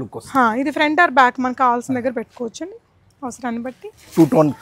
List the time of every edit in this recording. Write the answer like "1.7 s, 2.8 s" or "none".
none